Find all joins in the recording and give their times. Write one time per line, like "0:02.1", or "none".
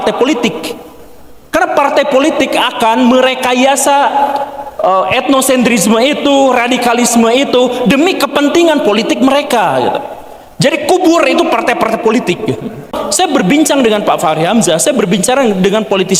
0:12.9